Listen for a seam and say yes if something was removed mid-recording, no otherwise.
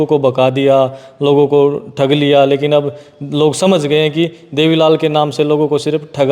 no